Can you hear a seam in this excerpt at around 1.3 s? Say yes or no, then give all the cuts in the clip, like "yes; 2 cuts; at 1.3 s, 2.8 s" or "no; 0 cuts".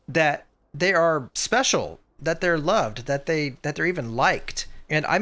yes; 1 cut; at 1.3 s